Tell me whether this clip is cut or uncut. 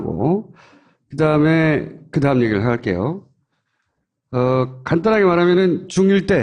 uncut